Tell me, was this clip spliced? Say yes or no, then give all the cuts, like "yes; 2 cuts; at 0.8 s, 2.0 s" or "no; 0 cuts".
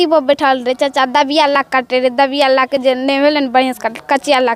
no; 0 cuts